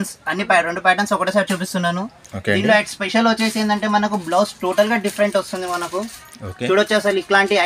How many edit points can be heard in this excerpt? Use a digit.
0